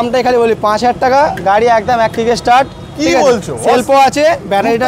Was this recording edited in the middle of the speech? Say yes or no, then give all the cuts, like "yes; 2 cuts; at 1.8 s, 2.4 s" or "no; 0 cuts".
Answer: no; 0 cuts